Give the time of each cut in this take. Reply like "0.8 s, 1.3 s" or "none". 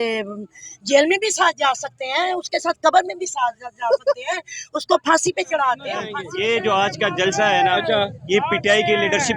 6.2 s